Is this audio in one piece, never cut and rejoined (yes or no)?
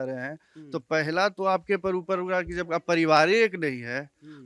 yes